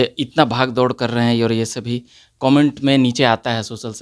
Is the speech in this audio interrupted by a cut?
no; 0 cuts

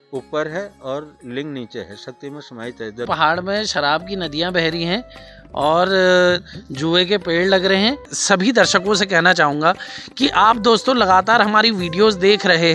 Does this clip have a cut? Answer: yes; 2 cuts; at 3.1 s, 8.1 s

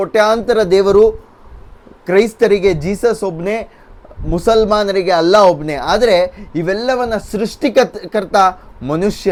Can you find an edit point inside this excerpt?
no; 0 cuts

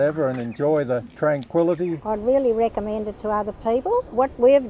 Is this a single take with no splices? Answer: no; 1 cut; at 2.0 s

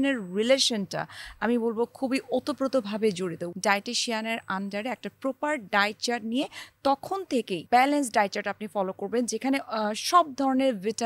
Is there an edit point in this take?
yes; 2 cuts; at 3.4 s, 7.7 s

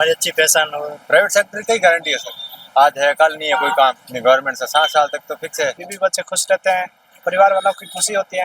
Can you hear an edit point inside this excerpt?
yes; 2 cuts; at 1.0 s, 5.9 s

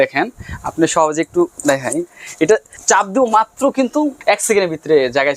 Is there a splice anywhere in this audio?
yes; 2 cuts; at 2.7 s, 4.2 s

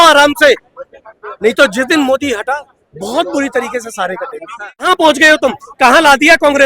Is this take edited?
yes; 1 cut; at 4.9 s

